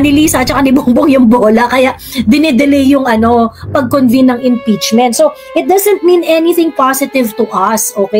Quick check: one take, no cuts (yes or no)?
yes